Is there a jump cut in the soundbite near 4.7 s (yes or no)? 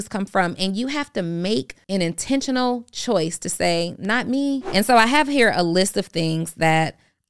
yes